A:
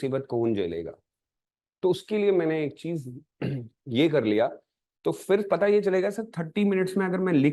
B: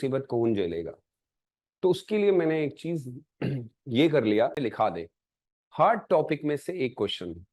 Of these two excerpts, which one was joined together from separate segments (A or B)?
B